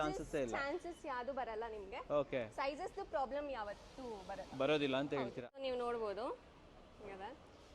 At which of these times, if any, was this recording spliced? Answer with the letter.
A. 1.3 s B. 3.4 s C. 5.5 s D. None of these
C